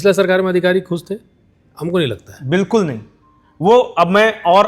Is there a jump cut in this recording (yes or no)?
no